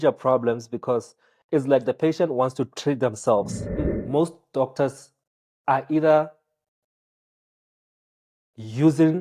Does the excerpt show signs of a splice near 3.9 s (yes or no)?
yes